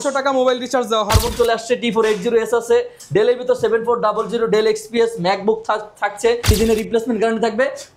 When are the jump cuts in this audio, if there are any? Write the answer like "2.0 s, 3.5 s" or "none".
1.1 s, 6.5 s